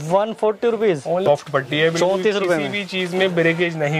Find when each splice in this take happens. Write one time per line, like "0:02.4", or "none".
0:01.3